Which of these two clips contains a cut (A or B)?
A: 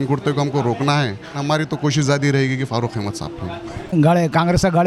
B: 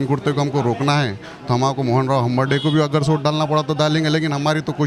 A